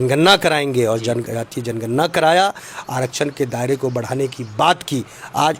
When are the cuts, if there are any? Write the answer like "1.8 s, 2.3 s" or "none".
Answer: none